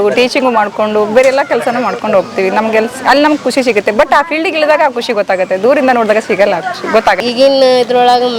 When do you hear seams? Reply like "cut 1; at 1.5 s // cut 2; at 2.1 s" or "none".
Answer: cut 1; at 7.2 s